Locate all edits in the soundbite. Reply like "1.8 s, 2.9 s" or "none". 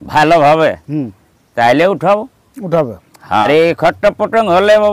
3.5 s